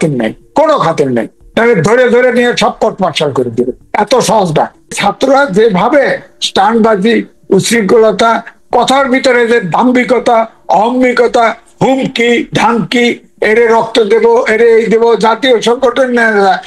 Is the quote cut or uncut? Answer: cut